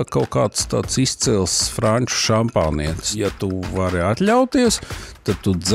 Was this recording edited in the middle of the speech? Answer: yes; 1 cut; at 3.0 s

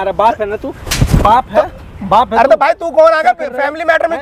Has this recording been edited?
no; 0 cuts

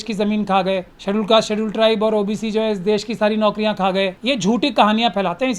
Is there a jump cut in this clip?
yes; 2 cuts; at 0.9 s, 4.2 s

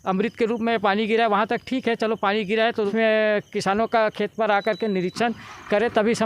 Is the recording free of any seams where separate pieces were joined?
no; 1 cut; at 2.9 s

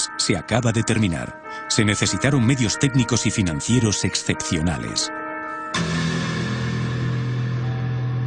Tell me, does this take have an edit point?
yes; 1 cut; at 4.4 s

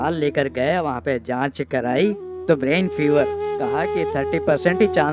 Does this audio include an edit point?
no; 0 cuts

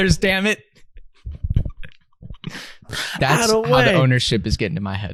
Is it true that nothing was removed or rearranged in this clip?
yes; 0 cuts

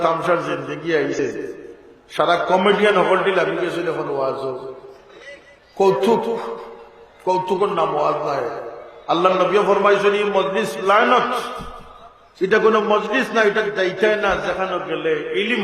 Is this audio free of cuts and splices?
no; 1 cut; at 1.1 s

